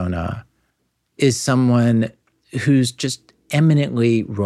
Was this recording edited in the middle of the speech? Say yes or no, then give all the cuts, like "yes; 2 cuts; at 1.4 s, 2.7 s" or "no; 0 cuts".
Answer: no; 0 cuts